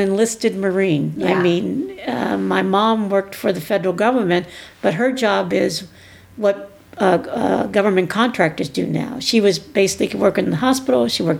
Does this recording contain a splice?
no; 0 cuts

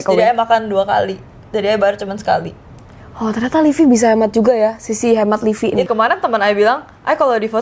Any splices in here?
yes; 1 cut; at 5.9 s

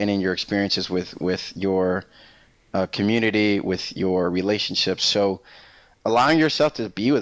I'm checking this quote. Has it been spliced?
no; 0 cuts

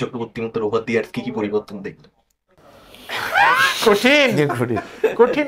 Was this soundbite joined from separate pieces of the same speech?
no; 0 cuts

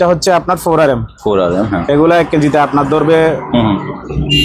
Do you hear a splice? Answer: no; 0 cuts

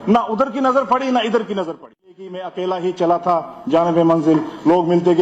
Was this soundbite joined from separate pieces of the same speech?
yes; 1 cut; at 2.4 s

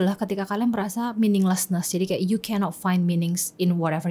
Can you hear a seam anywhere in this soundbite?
no; 0 cuts

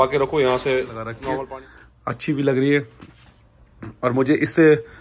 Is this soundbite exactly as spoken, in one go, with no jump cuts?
no; 1 cut; at 1.4 s

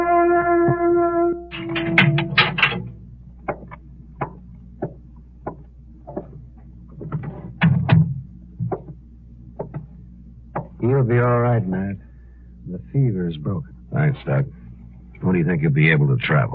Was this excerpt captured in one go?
no; 1 cut; at 11.4 s

